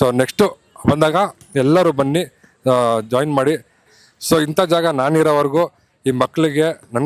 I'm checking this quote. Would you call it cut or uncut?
cut